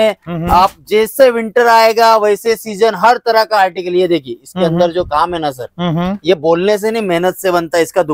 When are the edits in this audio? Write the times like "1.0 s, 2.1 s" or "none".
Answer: none